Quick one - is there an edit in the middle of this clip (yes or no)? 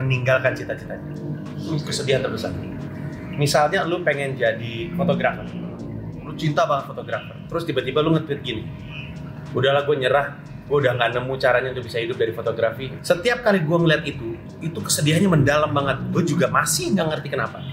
no